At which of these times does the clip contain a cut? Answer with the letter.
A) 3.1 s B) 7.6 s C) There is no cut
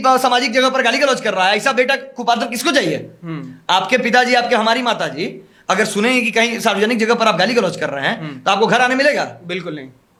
C